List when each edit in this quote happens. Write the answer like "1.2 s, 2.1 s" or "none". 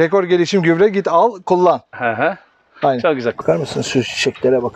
3.4 s